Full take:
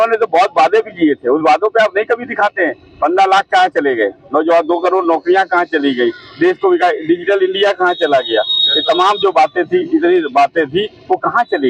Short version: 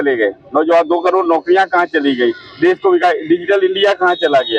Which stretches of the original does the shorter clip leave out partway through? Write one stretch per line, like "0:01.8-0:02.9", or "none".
none